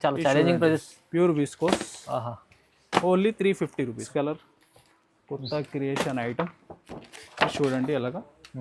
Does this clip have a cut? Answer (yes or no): yes